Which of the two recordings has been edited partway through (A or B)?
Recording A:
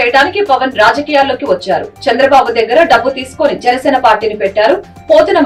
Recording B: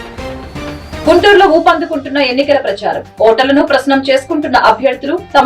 B